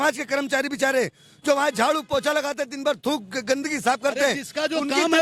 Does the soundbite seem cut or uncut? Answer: uncut